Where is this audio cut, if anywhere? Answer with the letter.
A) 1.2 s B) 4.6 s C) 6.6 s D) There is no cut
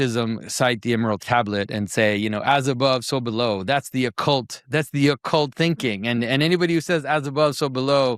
A